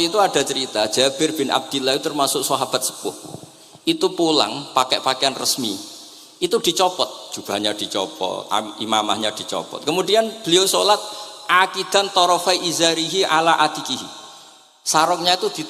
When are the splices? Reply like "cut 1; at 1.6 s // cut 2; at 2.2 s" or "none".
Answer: none